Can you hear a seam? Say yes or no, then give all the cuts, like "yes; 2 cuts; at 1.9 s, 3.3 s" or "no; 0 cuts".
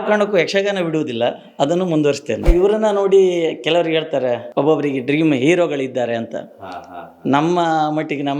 yes; 2 cuts; at 2.5 s, 4.4 s